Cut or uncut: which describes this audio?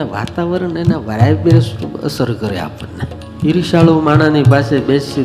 cut